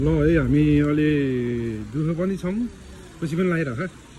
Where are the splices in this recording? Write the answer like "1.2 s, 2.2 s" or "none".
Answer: none